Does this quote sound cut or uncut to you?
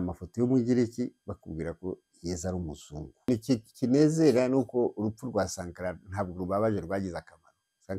cut